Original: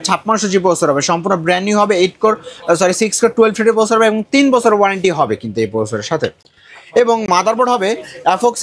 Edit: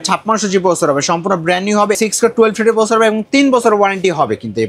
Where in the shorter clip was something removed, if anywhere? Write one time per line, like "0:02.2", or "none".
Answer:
0:02.0